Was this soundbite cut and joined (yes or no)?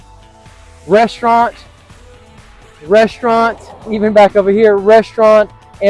no